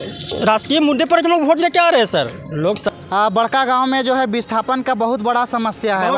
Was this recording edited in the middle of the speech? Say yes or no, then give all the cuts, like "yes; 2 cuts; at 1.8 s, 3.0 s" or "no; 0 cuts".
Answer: yes; 1 cut; at 2.8 s